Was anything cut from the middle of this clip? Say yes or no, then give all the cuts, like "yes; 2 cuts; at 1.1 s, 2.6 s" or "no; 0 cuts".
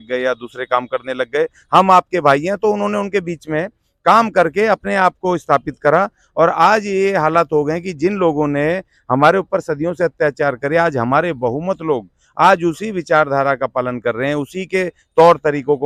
no; 0 cuts